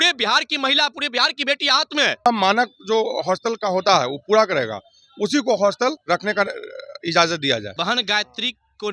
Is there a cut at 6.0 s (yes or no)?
yes